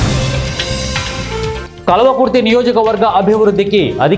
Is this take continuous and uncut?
yes; 0 cuts

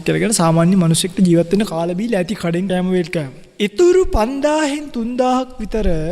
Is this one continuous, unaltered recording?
no; 2 cuts; at 2.7 s, 3.4 s

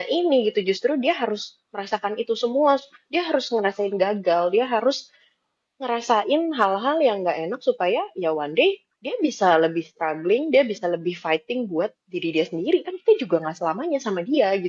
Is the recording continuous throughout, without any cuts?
yes; 0 cuts

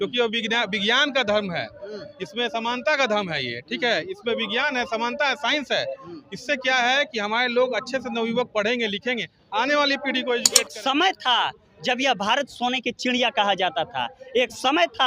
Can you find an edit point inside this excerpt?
yes; 1 cut; at 10.6 s

